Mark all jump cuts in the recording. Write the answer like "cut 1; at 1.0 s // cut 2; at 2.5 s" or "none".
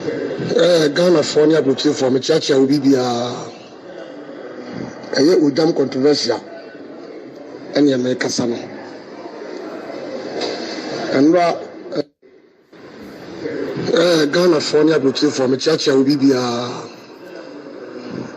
cut 1; at 12.0 s